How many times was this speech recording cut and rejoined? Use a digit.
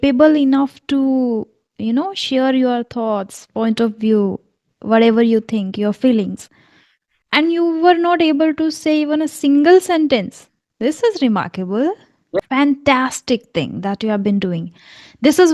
1